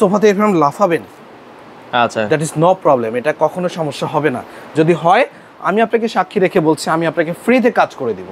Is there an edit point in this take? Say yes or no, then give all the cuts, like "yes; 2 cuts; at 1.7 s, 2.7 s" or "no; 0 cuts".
no; 0 cuts